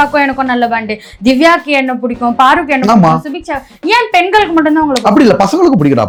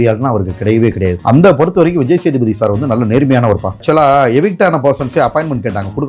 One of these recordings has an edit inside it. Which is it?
second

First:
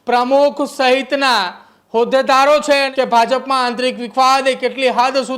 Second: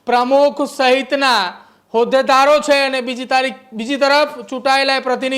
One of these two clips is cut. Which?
first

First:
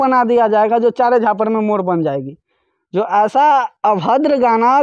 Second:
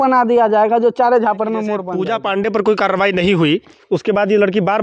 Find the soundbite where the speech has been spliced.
second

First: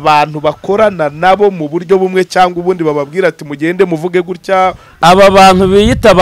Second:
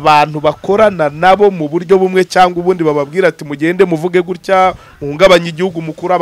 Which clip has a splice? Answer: first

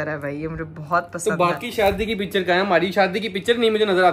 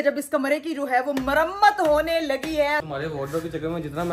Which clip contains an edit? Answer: second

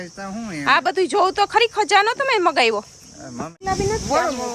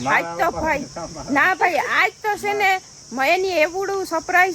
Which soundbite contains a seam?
first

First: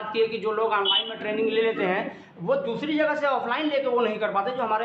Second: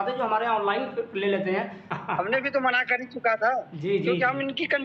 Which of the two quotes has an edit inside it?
second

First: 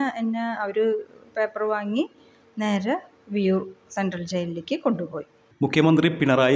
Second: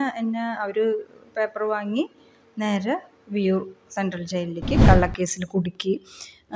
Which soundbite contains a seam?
second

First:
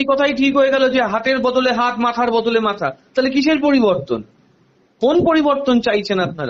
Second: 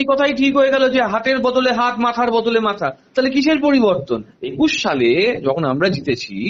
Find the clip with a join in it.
second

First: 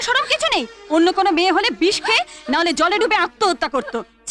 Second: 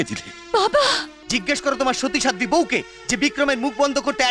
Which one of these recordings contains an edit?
second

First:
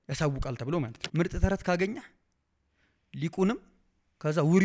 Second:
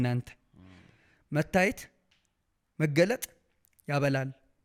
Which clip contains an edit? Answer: first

